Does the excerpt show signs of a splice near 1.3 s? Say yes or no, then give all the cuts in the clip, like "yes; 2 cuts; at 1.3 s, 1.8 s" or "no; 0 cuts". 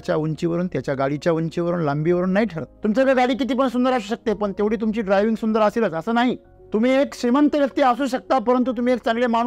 no; 2 cuts; at 2.7 s, 6.5 s